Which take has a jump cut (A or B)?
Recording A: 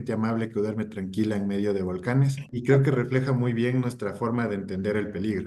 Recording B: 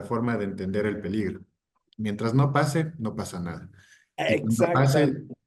A